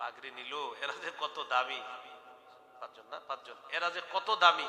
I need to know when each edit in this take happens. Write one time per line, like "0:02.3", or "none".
none